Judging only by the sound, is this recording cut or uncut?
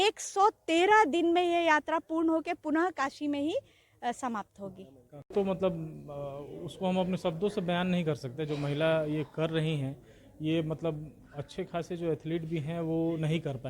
cut